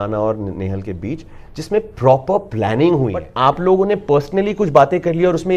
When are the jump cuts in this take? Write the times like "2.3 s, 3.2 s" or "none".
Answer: 3.3 s